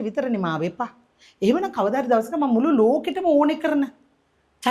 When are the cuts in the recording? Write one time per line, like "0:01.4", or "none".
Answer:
none